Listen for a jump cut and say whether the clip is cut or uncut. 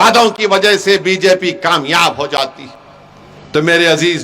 uncut